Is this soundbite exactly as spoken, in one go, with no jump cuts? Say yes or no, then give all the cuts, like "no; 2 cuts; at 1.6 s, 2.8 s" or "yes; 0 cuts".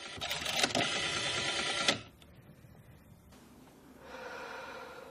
yes; 0 cuts